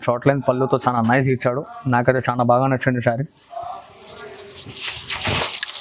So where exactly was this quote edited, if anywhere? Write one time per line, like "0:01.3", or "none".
none